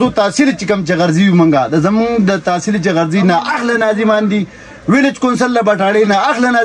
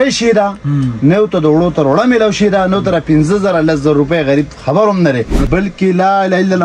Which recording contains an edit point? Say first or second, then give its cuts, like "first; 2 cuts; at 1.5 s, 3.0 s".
second; 1 cut; at 5.4 s